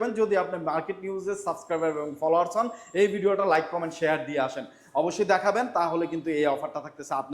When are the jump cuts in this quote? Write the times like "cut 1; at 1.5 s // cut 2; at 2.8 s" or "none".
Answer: none

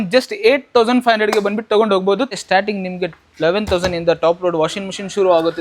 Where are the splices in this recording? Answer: cut 1; at 2.3 s

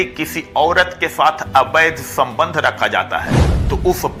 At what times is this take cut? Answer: none

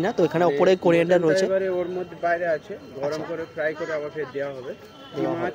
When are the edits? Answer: none

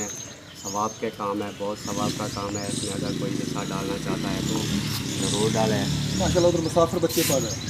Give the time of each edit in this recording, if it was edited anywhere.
none

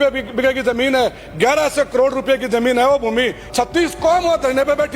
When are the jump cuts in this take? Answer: cut 1; at 3.4 s

